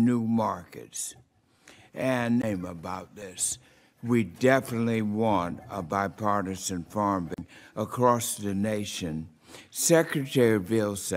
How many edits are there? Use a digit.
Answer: 0